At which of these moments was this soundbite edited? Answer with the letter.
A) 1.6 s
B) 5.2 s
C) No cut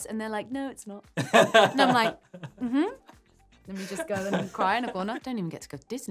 B